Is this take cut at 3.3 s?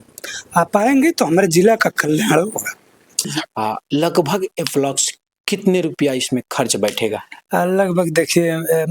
yes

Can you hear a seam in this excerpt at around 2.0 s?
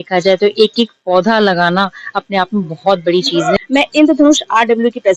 no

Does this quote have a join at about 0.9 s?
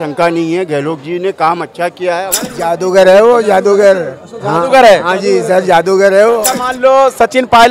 no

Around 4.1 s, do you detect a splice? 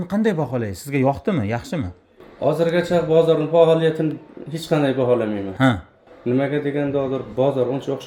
no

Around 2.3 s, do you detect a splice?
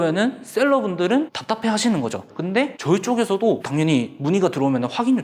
yes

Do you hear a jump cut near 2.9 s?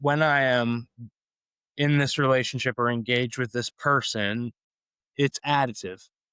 no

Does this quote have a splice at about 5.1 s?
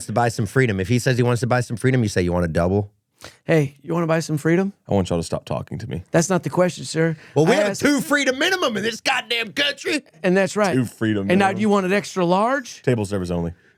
no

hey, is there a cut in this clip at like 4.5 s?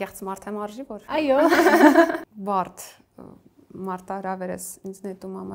no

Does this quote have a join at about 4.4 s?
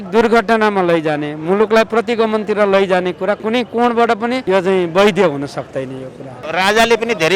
yes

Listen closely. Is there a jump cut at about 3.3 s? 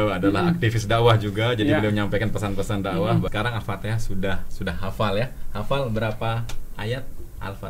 yes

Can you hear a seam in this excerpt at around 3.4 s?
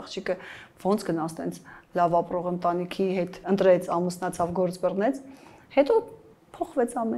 yes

